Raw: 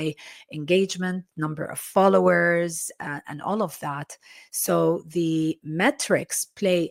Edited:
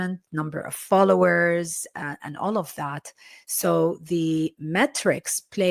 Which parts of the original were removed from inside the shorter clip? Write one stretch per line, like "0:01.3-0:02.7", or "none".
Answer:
none